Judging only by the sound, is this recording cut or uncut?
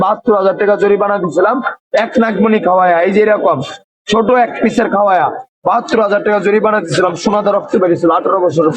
uncut